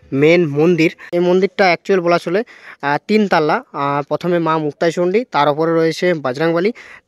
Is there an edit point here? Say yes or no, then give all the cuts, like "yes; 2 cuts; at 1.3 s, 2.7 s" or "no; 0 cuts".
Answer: yes; 1 cut; at 1.0 s